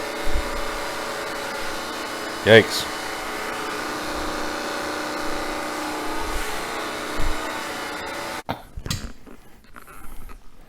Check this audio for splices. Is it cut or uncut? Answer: cut